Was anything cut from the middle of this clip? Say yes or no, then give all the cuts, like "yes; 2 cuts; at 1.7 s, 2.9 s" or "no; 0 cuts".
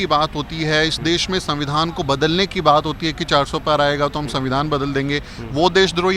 no; 0 cuts